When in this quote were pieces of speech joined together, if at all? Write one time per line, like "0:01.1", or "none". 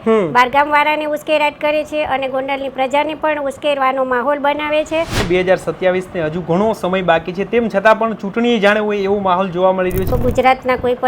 0:05.2
0:10.2